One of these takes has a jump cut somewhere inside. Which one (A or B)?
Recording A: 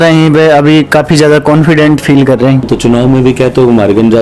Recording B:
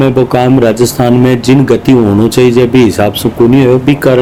A